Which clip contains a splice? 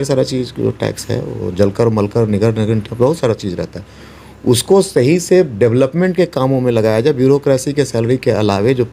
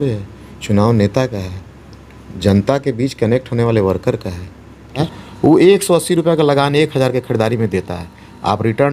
second; 1 cut; at 5.0 s

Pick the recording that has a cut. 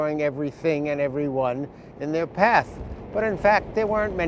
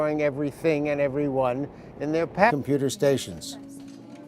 first; 1 cut; at 2.5 s

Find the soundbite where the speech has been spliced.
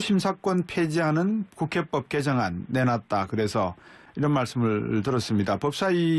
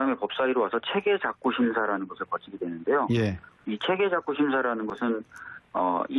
first; 1 cut; at 2.2 s

